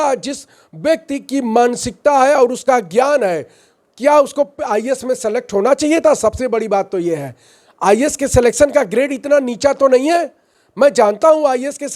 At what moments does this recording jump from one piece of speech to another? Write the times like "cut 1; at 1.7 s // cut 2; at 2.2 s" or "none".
none

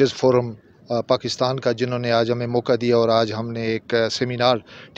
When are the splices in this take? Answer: none

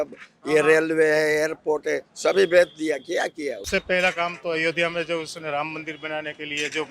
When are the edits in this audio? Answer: cut 1; at 3.6 s

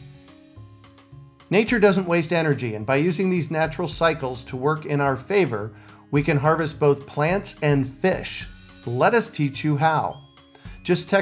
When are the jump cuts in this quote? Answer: cut 1; at 1.4 s

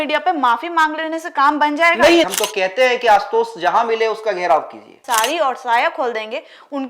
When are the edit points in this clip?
cut 1; at 2.3 s // cut 2; at 5.0 s

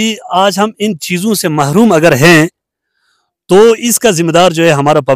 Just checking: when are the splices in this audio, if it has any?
none

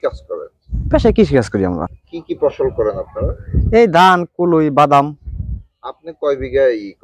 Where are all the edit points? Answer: cut 1; at 2.0 s

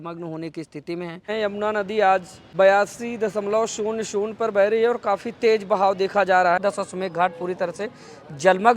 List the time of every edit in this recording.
cut 1; at 1.3 s // cut 2; at 2.4 s // cut 3; at 6.6 s

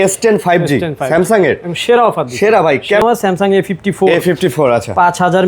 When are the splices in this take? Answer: cut 1; at 3.0 s

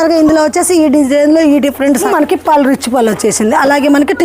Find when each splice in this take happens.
cut 1; at 2.1 s

